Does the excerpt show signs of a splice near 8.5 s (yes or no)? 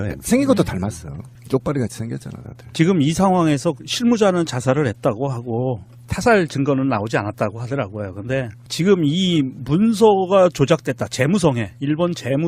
no